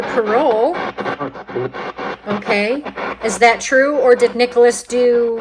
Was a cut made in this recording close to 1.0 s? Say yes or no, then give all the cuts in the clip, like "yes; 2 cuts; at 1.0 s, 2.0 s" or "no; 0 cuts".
no; 1 cut; at 2.9 s